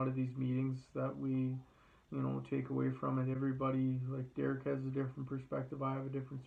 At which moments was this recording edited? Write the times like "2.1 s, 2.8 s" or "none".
none